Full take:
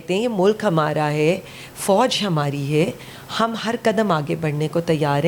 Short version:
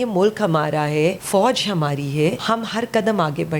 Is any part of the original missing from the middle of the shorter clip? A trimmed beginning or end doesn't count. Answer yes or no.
yes